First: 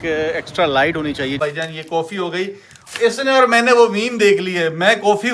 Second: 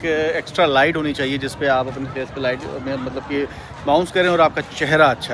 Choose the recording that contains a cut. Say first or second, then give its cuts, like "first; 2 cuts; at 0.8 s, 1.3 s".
first; 1 cut; at 1.4 s